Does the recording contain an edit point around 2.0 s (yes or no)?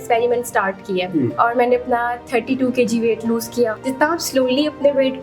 no